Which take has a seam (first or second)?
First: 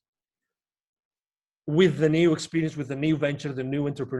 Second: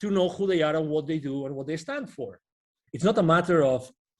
second